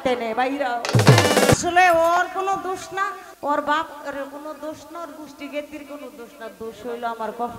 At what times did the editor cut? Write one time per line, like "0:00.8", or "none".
0:01.5
0:03.3